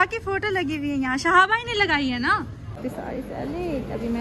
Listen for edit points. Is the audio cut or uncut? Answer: cut